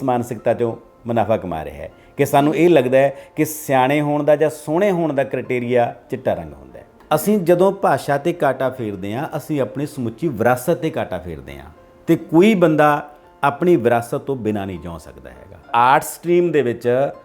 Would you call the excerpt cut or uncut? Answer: cut